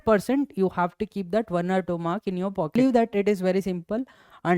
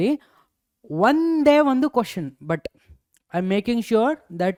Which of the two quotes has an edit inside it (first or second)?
first